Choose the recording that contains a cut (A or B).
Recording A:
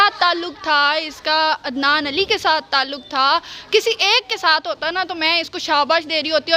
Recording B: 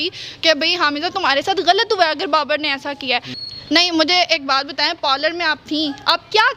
B